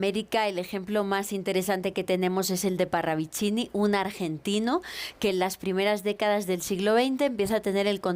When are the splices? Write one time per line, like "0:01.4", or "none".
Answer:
none